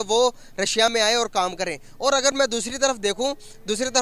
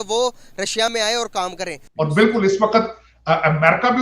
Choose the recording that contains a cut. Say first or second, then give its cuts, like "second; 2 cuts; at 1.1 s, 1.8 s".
second; 1 cut; at 1.8 s